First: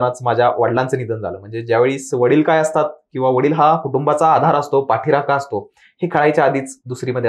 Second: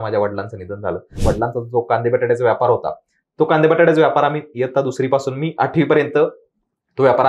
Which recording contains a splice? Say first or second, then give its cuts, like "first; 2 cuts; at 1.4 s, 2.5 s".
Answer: second; 1 cut; at 1.1 s